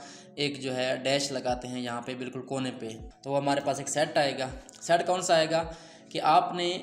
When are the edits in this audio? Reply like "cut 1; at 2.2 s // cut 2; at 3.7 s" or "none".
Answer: cut 1; at 3.1 s